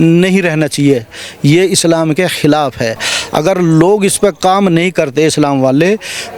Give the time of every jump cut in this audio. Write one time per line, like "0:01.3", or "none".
none